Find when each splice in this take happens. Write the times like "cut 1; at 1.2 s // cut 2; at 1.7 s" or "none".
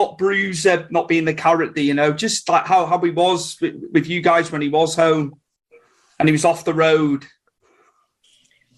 cut 1; at 1.3 s